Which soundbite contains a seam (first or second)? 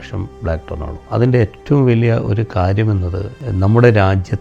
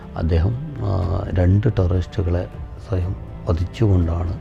first